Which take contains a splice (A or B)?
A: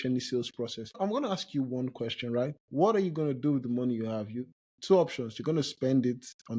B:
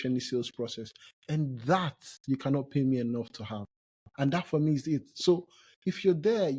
A